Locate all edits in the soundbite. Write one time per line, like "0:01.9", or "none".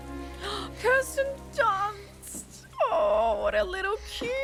none